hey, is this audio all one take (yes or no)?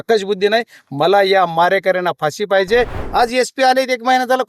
no